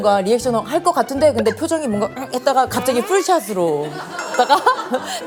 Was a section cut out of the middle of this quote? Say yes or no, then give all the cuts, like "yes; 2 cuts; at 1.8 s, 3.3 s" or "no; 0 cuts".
no; 0 cuts